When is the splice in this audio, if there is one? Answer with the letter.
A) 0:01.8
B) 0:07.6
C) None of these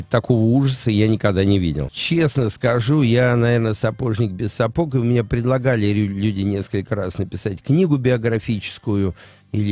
A